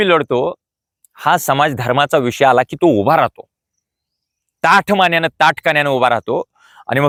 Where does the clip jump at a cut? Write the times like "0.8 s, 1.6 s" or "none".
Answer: none